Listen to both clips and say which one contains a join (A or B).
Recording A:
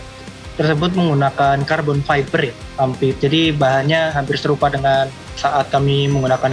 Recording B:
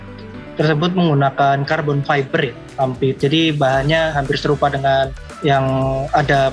A